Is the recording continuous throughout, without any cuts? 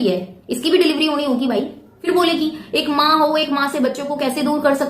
no; 1 cut; at 1.9 s

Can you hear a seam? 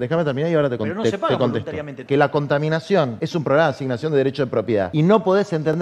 yes; 3 cuts; at 2.0 s, 3.2 s, 4.9 s

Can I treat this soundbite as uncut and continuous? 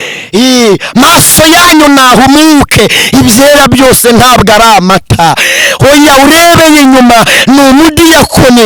yes; 0 cuts

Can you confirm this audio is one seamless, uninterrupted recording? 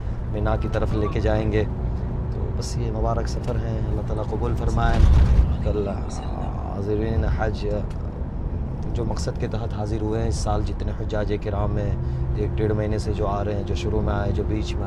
yes; 0 cuts

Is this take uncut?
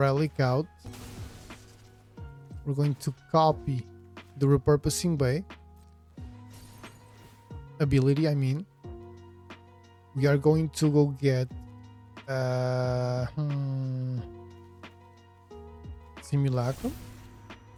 yes; 0 cuts

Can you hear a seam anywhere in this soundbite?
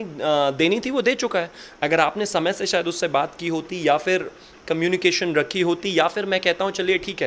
no; 0 cuts

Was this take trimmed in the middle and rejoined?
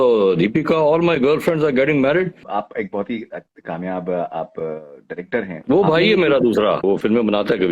yes; 2 cuts; at 2.4 s, 6.8 s

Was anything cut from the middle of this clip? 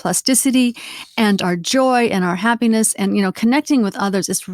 no; 0 cuts

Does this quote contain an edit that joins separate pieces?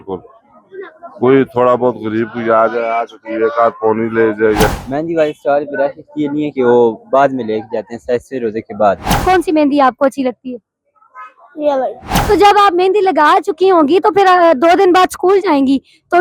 yes; 3 cuts; at 4.7 s, 9.2 s, 12.1 s

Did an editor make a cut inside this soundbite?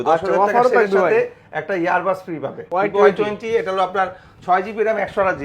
yes; 1 cut; at 2.6 s

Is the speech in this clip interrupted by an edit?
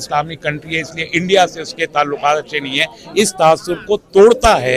no; 0 cuts

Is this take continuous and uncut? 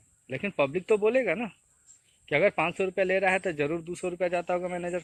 yes; 0 cuts

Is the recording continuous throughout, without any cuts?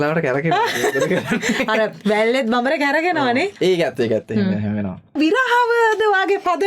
no; 1 cut; at 5.2 s

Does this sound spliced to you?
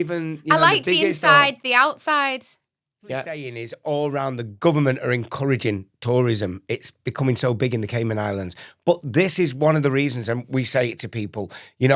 yes; 1 cut; at 3.5 s

